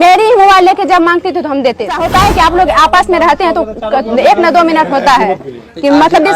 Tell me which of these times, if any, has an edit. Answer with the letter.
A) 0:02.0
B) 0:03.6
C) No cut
A